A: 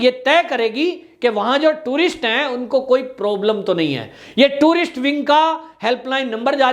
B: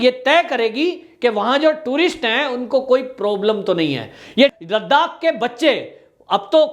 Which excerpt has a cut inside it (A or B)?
B